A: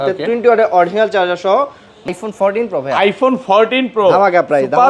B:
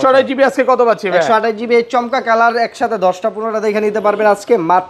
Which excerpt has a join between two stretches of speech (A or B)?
A